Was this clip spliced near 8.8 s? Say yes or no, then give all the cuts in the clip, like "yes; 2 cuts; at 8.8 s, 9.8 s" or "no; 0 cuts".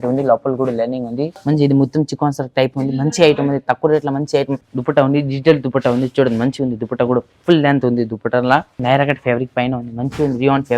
yes; 3 cuts; at 1.3 s, 4.7 s, 8.8 s